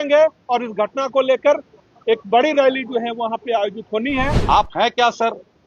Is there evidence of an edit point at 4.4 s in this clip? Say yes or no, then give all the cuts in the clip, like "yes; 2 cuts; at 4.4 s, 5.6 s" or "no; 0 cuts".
yes; 1 cut; at 4.4 s